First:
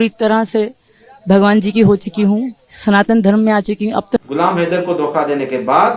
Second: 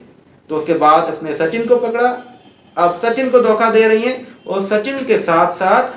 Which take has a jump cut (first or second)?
first